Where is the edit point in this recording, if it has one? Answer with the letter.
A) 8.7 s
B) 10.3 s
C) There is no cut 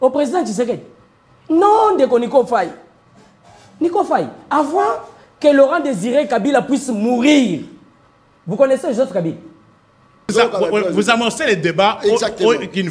B